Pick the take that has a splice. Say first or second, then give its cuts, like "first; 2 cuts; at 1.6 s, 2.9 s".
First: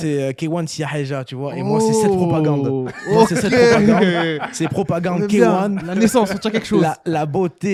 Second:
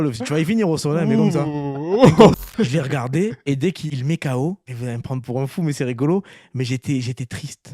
second; 3 cuts; at 2.3 s, 3.8 s, 4.7 s